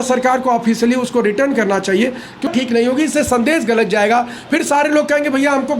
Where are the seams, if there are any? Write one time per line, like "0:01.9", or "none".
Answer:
0:02.5